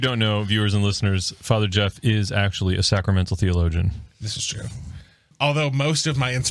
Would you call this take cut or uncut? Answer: cut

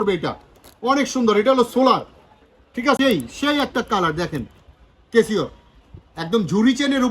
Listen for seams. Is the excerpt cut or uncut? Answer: cut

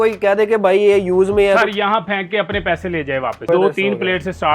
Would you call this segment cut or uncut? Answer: cut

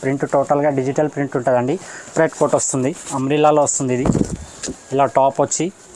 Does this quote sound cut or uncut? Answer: cut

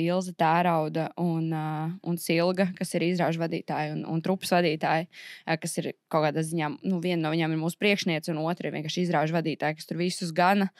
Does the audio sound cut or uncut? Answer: uncut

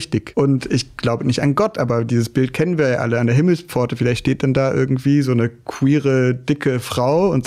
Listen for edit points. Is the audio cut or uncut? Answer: uncut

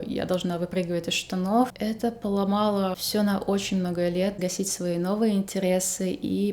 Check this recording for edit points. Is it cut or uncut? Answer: cut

